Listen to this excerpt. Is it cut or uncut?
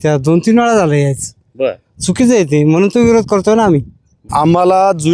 cut